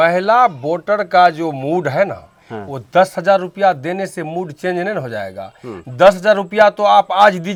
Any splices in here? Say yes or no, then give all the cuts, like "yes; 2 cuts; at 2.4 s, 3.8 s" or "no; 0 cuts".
no; 0 cuts